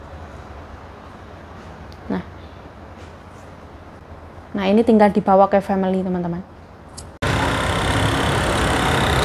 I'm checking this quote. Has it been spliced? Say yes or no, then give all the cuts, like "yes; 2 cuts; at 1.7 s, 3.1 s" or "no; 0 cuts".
no; 0 cuts